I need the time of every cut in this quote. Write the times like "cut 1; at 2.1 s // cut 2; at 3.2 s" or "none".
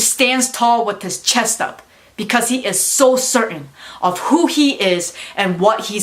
none